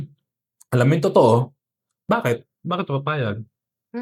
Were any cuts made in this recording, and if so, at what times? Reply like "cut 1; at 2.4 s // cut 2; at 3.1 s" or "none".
cut 1; at 2.0 s